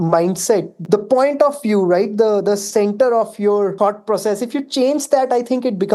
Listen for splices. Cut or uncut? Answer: cut